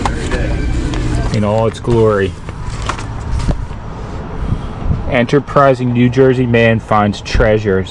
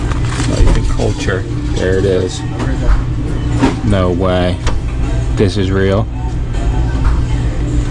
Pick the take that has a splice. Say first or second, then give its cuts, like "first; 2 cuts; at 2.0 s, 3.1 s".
first; 1 cut; at 1.3 s